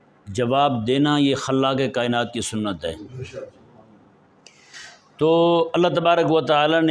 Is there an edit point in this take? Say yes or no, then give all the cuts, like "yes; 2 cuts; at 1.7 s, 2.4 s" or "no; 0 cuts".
no; 0 cuts